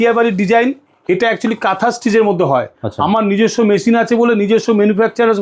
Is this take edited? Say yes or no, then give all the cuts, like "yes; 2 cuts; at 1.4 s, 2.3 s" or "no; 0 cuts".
no; 0 cuts